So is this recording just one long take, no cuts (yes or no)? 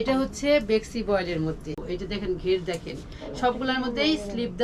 no